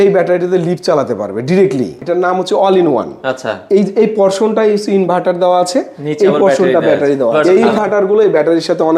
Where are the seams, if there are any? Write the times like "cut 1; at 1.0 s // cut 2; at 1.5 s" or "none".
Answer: cut 1; at 2.0 s // cut 2; at 7.3 s